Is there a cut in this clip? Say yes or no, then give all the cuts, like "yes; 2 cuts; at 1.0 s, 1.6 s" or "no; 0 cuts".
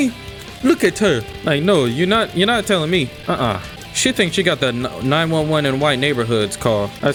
no; 0 cuts